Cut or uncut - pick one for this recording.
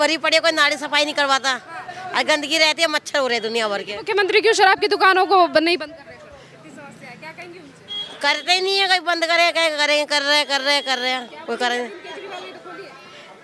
uncut